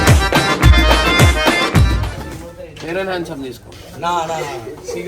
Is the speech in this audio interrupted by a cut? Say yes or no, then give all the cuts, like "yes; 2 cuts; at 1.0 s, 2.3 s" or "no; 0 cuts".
no; 0 cuts